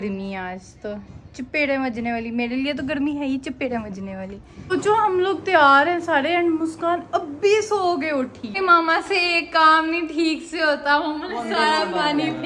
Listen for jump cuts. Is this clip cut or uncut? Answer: cut